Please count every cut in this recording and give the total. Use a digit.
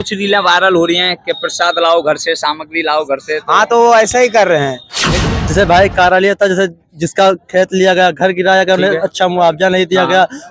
1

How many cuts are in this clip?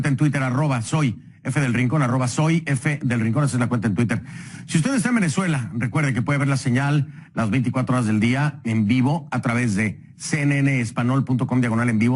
0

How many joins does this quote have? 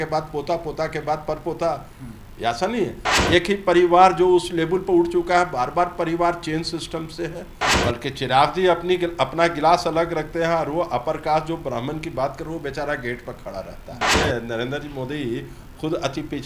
3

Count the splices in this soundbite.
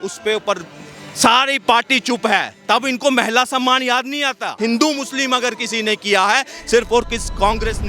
1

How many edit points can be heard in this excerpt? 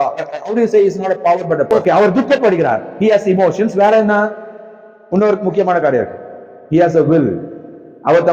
1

